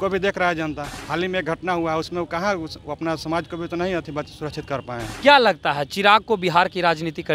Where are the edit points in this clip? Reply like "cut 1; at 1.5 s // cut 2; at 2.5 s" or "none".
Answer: cut 1; at 0.9 s // cut 2; at 5.1 s